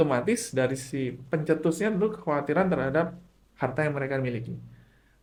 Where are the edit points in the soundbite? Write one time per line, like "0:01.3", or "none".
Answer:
none